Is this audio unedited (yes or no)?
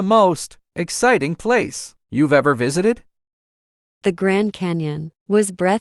yes